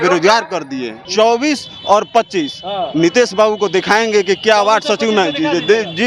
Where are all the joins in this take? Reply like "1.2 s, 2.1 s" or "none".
1.1 s